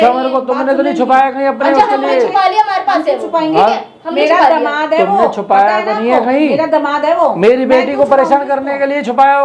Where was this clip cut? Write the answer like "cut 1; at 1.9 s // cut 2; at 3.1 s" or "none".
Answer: none